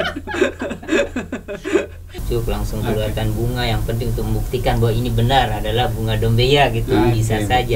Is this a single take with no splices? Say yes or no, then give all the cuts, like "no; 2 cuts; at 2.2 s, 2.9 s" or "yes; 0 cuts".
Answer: no; 1 cut; at 2.2 s